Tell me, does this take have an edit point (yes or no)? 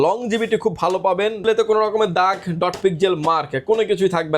yes